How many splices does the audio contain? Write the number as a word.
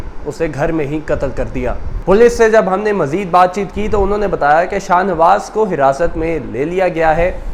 zero